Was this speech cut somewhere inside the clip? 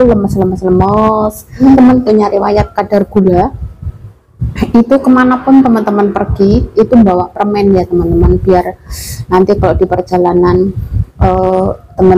yes; 1 cut; at 1.6 s

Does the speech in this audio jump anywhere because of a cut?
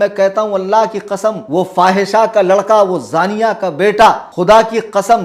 yes; 2 cuts; at 1.4 s, 4.3 s

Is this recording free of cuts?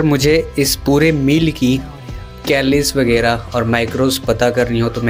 yes; 0 cuts

